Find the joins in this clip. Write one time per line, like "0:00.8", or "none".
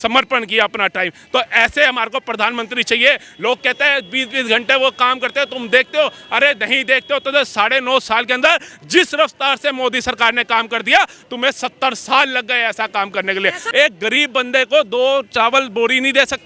0:13.6